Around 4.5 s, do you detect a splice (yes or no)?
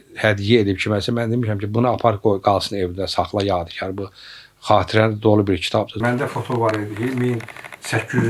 no